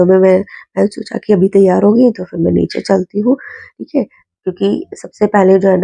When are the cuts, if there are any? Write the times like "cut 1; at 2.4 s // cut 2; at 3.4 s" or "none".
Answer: none